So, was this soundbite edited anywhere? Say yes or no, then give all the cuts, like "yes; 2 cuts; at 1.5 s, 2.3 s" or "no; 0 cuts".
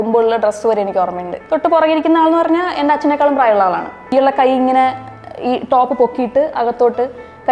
yes; 2 cuts; at 1.3 s, 4.1 s